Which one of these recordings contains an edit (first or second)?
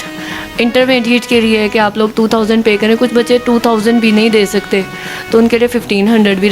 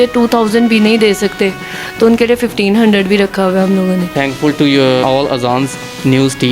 second